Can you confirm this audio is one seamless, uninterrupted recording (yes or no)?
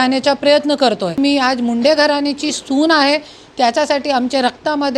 no